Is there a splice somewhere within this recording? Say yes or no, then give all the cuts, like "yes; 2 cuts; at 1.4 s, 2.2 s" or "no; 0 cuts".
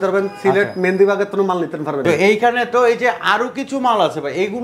yes; 1 cut; at 2.0 s